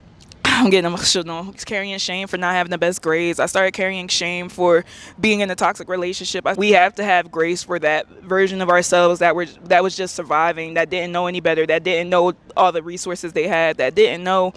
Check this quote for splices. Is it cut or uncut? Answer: cut